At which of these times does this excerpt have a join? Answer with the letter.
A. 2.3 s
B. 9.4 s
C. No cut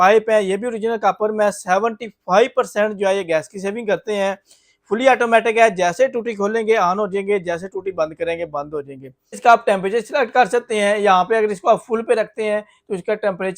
B